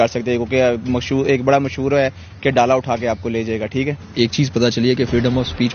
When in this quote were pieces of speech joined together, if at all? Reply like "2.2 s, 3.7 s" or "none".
3.9 s